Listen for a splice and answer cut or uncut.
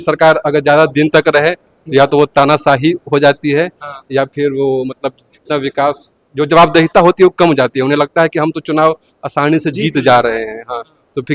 uncut